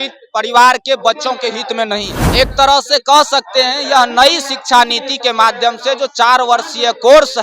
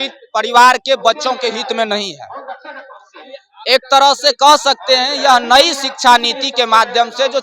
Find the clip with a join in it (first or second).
first